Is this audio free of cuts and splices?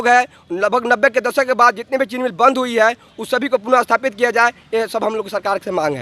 yes; 0 cuts

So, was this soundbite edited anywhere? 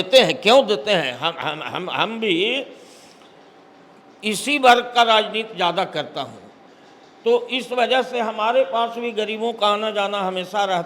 no; 0 cuts

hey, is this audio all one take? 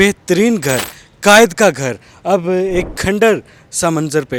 yes; 0 cuts

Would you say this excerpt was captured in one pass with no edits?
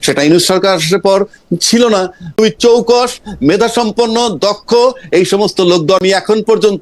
no; 2 cuts; at 2.3 s, 6.0 s

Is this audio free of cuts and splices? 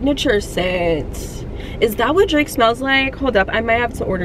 yes; 0 cuts

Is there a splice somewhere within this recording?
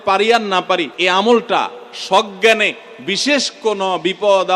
yes; 1 cut; at 0.9 s

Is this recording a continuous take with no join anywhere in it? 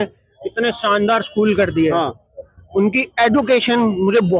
yes; 0 cuts

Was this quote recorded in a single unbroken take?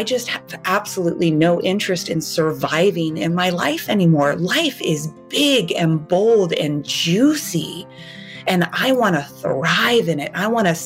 yes; 0 cuts

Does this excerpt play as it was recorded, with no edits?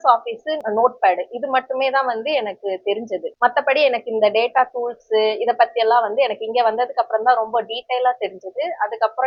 yes; 0 cuts

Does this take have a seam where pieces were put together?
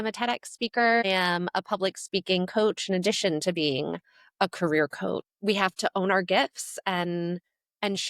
yes; 2 cuts; at 1.0 s, 5.3 s

